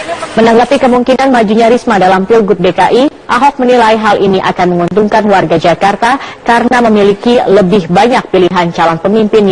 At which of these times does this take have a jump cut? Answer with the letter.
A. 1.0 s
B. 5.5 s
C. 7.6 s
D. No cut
D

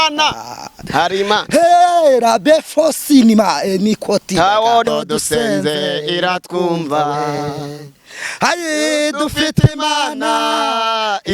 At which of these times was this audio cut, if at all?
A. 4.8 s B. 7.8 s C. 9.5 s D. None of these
A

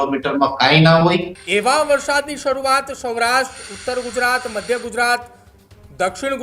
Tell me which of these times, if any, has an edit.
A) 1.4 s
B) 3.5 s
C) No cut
A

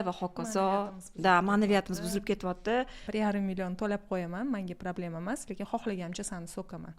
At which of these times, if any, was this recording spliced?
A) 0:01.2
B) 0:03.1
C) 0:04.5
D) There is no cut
B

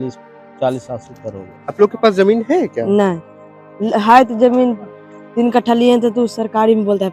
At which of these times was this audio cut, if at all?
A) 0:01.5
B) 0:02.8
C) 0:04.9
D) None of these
A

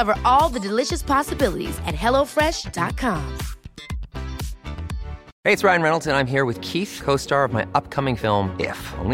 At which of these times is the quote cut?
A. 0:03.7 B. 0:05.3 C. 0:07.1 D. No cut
B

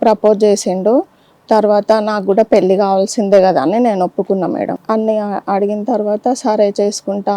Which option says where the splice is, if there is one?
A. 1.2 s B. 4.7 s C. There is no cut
B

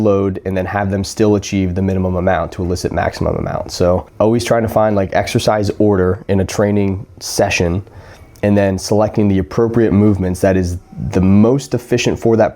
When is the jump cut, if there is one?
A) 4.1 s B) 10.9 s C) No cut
A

